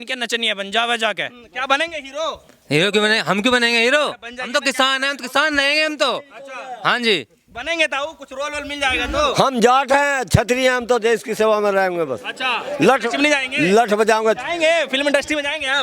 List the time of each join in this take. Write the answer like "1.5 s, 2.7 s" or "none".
none